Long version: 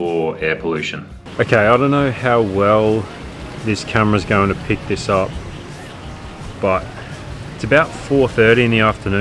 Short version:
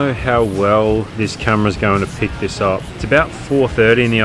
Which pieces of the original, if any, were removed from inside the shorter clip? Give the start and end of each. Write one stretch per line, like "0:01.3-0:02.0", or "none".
0:03.1-0:03.6
0:05.4-0:07.5